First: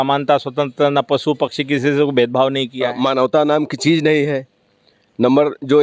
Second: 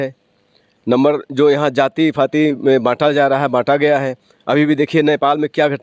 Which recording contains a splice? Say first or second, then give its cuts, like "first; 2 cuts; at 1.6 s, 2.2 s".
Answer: first; 1 cut; at 3.3 s